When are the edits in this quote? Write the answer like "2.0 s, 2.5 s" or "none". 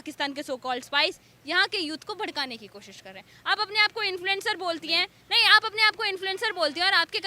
none